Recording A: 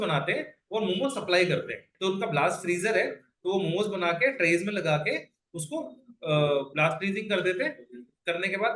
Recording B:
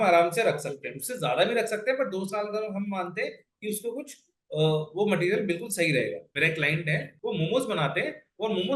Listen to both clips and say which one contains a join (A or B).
B